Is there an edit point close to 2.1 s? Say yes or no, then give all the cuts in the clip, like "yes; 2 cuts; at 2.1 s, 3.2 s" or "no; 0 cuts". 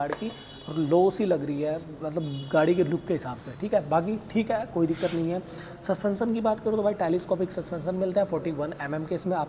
no; 0 cuts